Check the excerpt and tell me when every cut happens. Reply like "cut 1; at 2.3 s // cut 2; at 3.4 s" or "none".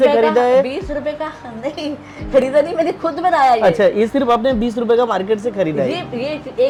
none

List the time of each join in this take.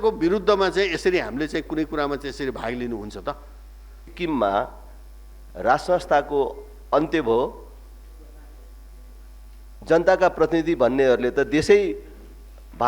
cut 1; at 4.0 s

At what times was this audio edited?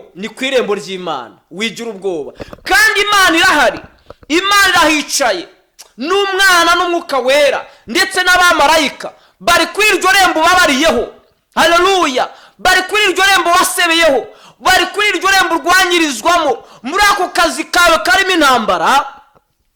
none

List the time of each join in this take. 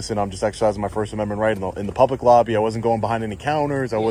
none

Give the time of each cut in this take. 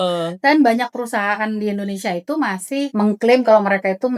cut 1; at 2.9 s

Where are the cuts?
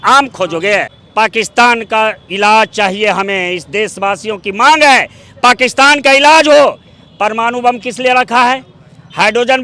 cut 1; at 1.0 s

